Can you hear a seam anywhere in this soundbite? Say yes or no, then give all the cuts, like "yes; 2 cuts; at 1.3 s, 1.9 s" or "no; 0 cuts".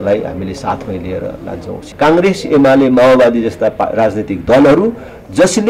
yes; 1 cut; at 1.8 s